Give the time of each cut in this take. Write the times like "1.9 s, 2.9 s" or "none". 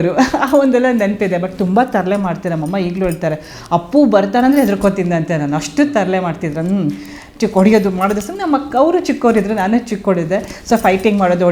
none